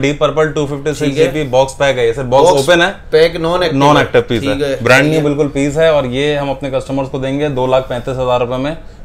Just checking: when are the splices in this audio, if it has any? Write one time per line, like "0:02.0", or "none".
none